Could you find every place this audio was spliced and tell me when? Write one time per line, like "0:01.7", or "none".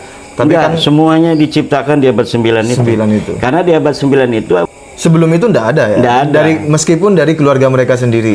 0:04.7